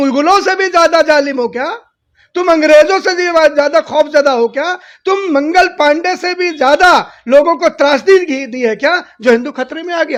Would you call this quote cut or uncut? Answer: uncut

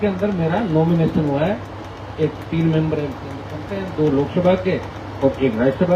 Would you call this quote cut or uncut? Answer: uncut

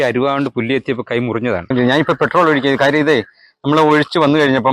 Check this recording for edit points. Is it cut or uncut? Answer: cut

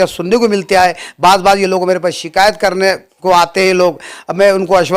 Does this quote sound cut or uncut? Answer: uncut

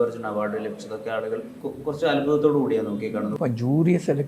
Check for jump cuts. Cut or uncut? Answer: cut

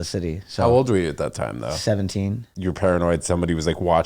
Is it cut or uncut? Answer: cut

